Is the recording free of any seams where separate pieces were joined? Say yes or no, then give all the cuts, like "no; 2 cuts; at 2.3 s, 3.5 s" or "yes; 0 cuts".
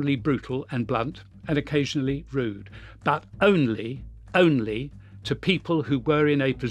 yes; 0 cuts